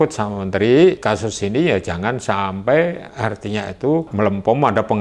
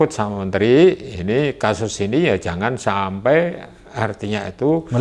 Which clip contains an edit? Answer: first; 3 cuts; at 1.0 s, 3.1 s, 4.1 s

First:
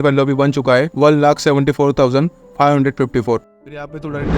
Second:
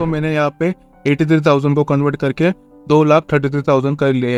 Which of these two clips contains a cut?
first; 2 cuts; at 0.9 s, 3.5 s

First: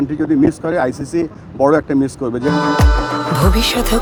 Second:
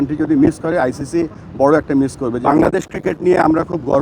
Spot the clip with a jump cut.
second; 1 cut; at 2.4 s

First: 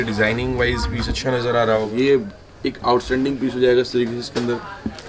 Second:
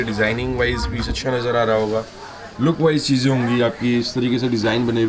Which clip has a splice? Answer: first; 1 cut; at 1.9 s

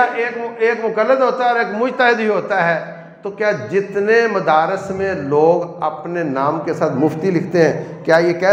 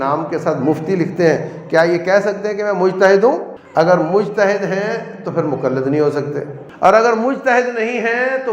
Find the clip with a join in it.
second; 2 cuts; at 3.6 s, 6.6 s

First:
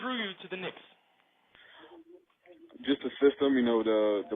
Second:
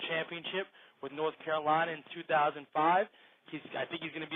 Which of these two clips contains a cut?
first; 1 cut; at 2.4 s

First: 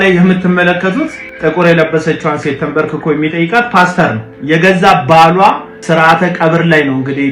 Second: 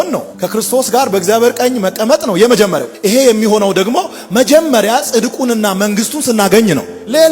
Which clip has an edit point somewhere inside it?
first; 2 cuts; at 1.2 s, 5.7 s

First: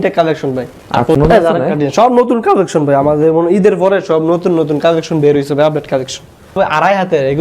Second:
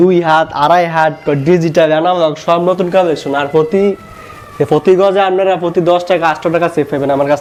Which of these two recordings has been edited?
first; 2 cuts; at 1.2 s, 6.6 s

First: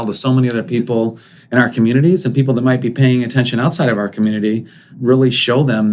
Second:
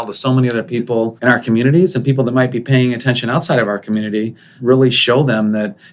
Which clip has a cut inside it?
second; 2 cuts; at 1.2 s, 4.4 s

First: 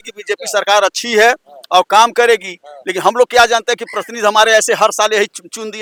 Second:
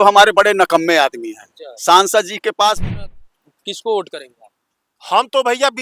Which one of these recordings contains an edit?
second; 1 cut; at 2.9 s

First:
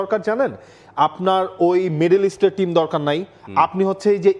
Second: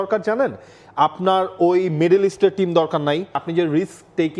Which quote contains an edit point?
second; 1 cut; at 3.4 s

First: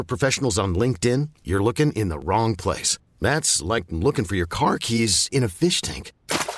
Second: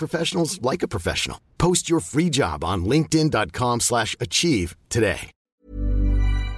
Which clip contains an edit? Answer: second; 1 cut; at 5.5 s

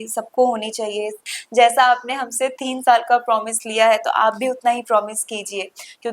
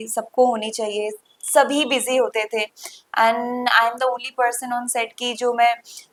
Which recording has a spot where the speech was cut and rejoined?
first; 1 cut; at 1.3 s

